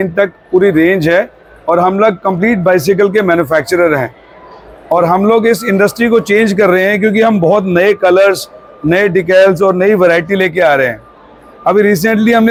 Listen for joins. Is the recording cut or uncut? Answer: uncut